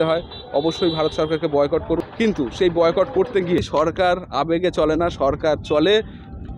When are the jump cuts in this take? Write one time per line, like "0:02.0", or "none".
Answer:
0:02.1
0:03.6